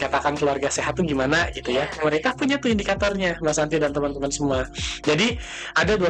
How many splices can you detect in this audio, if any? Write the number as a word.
zero